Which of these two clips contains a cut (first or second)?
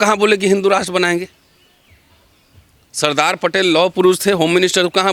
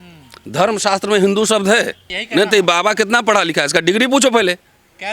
second